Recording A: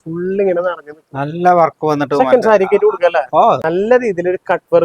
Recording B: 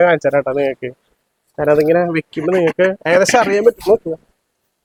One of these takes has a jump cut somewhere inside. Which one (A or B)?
A